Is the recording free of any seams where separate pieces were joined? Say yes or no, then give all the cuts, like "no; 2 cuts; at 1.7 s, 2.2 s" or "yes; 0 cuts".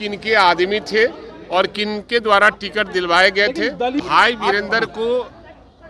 no; 1 cut; at 4.0 s